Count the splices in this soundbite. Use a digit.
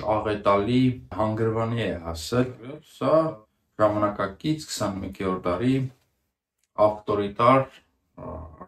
2